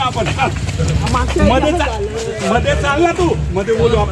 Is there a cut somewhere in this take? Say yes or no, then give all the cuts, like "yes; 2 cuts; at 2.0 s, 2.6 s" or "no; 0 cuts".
no; 0 cuts